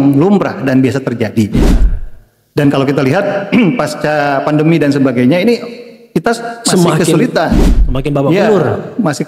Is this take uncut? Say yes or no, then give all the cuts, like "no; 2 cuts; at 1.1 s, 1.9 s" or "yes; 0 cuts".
yes; 0 cuts